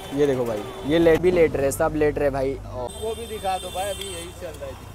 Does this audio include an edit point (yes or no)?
yes